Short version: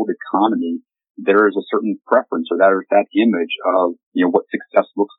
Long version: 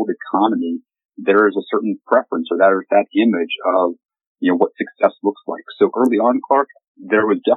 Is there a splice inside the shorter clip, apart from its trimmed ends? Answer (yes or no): yes